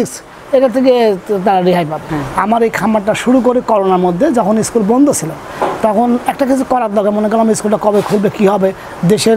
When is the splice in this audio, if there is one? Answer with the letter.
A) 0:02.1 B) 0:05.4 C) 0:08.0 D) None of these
A